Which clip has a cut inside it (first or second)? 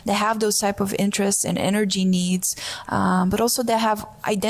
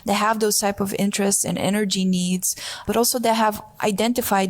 second